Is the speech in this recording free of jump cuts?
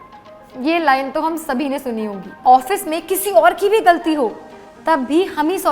no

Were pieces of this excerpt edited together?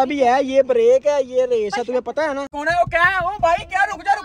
yes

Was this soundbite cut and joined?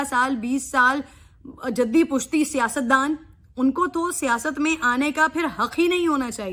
no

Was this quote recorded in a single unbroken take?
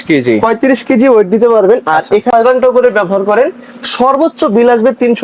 no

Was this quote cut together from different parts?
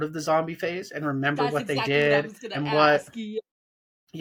no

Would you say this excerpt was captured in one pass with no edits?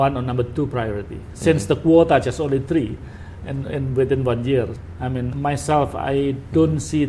no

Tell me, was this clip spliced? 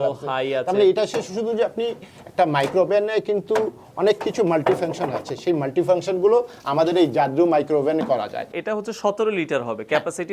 yes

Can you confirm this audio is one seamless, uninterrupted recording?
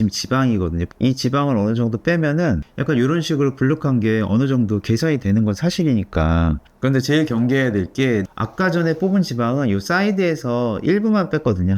no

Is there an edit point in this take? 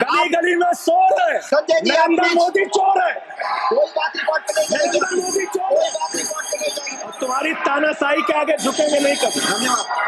yes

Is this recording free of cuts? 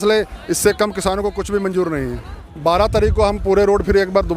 no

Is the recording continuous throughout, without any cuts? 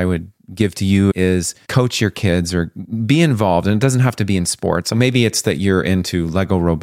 no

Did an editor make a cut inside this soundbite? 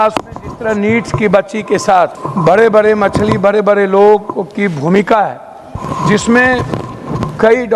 yes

